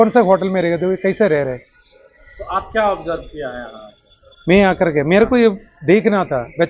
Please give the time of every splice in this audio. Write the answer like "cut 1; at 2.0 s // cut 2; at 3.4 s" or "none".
none